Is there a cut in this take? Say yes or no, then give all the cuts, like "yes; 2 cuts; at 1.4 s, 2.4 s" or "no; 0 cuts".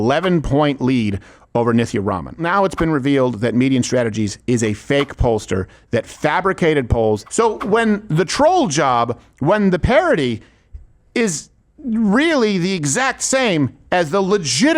yes; 2 cuts; at 2.4 s, 7.3 s